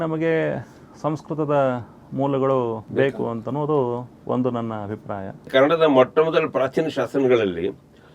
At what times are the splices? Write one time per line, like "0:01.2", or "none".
0:02.8
0:05.5